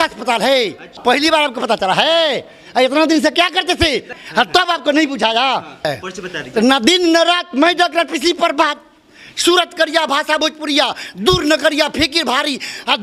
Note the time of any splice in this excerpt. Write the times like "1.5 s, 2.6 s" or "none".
1.0 s, 4.2 s, 5.9 s